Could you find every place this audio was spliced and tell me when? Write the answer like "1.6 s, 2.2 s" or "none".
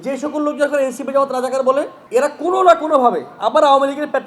2.0 s